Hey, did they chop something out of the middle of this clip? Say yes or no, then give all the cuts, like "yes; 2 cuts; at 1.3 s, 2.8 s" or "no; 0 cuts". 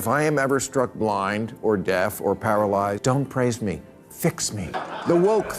yes; 2 cuts; at 3.0 s, 4.7 s